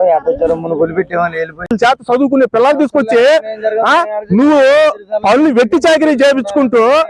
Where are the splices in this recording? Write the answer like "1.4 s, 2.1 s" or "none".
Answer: 1.7 s

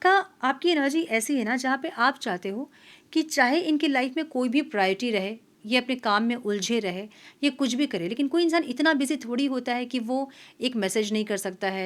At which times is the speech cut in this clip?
none

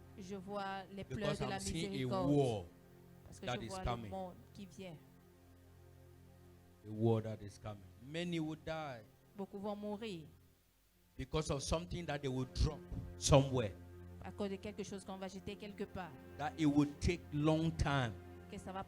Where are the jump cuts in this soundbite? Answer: 3.1 s, 9.6 s

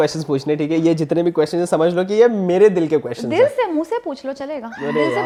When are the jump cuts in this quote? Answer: none

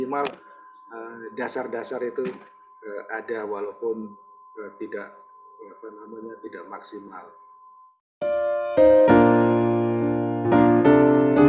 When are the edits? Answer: 7.9 s

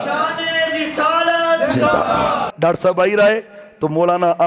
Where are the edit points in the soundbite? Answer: 2.5 s

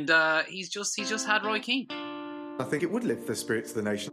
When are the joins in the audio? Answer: 1.9 s

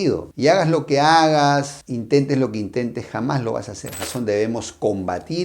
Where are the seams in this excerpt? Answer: 4.1 s

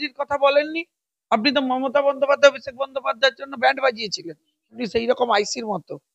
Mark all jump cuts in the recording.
4.8 s

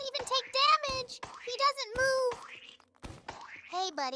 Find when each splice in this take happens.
none

